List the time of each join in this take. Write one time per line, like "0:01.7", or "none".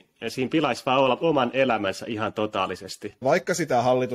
0:03.2